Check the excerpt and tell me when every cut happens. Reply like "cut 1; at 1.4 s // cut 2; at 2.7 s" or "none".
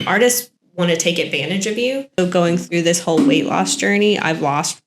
cut 1; at 2.2 s